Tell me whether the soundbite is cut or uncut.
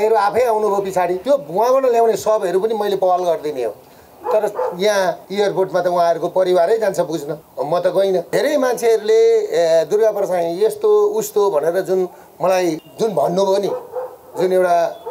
cut